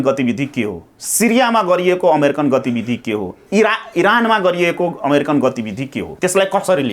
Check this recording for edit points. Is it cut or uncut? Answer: cut